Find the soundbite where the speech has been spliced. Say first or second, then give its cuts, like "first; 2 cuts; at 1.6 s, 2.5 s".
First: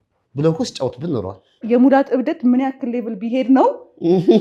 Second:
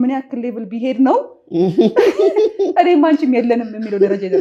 first; 1 cut; at 1.6 s